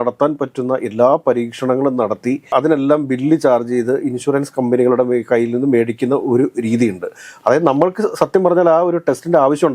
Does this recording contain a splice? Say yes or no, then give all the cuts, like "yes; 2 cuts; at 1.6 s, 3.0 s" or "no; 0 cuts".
no; 0 cuts